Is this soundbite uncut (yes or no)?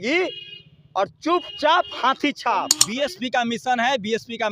no